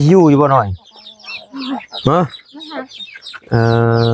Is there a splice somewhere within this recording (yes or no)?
no